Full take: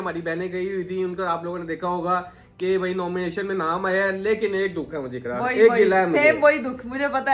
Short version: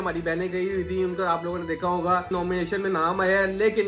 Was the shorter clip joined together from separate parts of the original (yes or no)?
yes